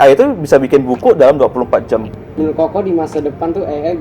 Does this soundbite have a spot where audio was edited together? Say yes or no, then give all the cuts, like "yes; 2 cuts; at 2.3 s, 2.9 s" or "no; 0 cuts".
yes; 1 cut; at 2.2 s